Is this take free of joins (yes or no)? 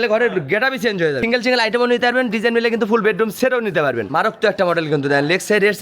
no